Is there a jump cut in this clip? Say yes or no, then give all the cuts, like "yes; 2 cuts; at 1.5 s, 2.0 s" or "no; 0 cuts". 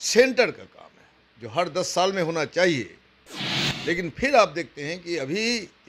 no; 0 cuts